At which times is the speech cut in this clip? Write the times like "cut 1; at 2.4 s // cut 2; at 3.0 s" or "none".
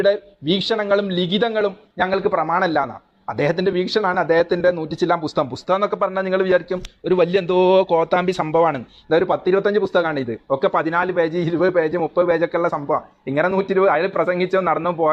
none

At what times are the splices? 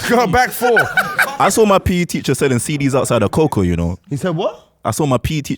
cut 1; at 1.1 s

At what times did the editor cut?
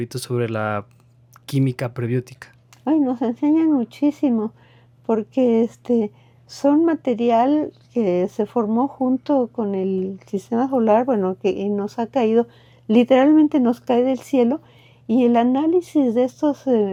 none

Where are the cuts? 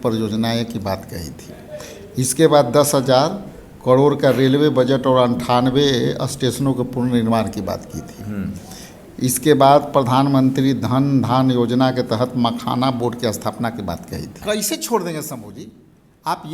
cut 1; at 14.4 s

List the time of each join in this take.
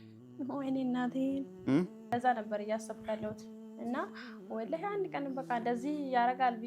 cut 1; at 2.1 s

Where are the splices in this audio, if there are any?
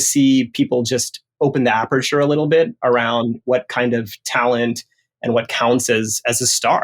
none

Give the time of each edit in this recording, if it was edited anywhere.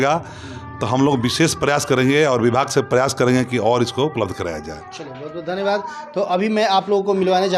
none

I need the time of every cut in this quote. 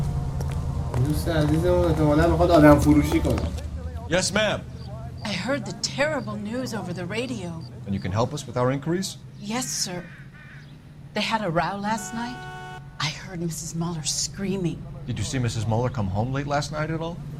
none

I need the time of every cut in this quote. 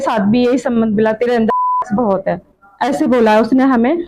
none

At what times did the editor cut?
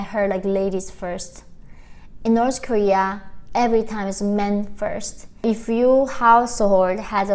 cut 1; at 5.4 s

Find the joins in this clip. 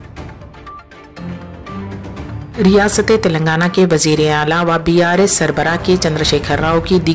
none

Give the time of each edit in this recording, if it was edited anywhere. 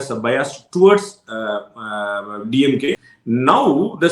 cut 1; at 3.0 s

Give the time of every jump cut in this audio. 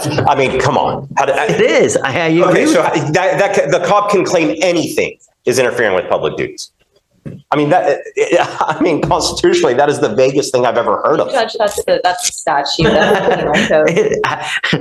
none

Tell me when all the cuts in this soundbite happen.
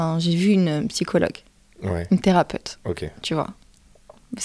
none

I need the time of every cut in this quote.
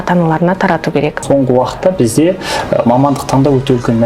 cut 1; at 1.2 s

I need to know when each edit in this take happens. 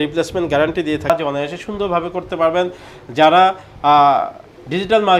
cut 1; at 1.1 s

